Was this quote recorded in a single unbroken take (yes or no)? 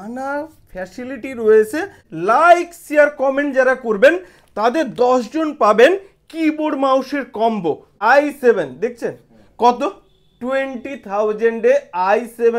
no